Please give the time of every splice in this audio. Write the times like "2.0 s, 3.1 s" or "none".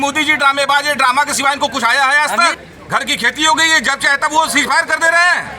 2.6 s